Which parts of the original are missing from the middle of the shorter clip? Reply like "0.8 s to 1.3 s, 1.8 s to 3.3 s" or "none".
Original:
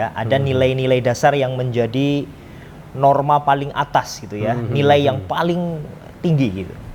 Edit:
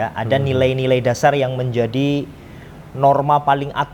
none